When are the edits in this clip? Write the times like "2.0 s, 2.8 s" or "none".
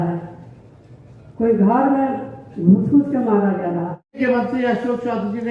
4.2 s